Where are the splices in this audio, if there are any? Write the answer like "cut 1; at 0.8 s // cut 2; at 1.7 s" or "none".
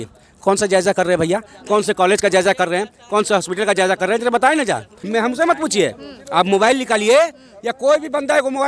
cut 1; at 5.0 s